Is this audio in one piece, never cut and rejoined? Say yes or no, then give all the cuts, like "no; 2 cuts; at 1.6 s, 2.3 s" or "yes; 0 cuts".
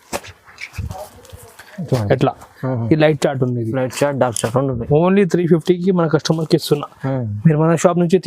yes; 0 cuts